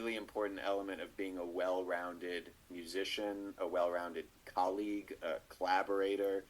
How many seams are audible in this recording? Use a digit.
0